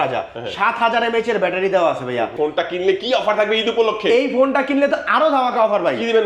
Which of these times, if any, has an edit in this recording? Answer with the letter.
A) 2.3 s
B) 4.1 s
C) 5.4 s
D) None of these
A